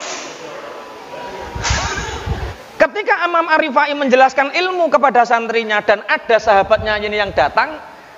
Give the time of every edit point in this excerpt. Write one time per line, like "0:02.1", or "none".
0:02.6